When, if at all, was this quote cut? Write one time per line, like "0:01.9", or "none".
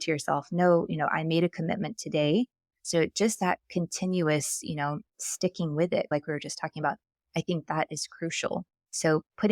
0:06.1